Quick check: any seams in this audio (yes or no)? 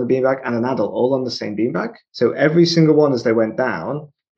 yes